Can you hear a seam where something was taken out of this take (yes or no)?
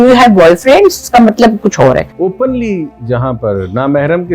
yes